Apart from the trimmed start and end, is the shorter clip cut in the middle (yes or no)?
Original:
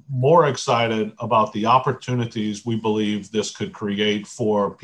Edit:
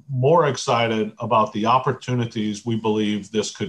no